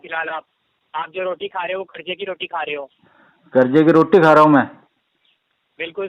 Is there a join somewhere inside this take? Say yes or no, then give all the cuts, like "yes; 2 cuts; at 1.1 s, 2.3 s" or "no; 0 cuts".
no; 0 cuts